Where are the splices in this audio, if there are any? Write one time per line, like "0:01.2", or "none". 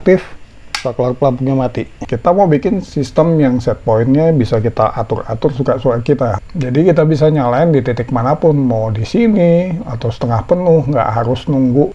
0:02.0